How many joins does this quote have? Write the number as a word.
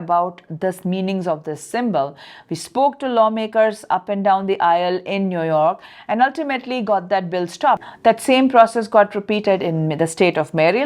one